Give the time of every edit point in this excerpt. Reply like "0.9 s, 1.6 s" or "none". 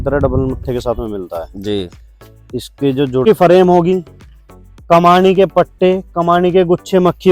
3.2 s